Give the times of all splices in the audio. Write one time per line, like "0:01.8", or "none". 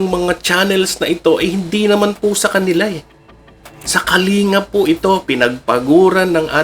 none